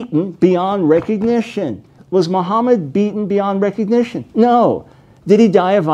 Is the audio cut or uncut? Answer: cut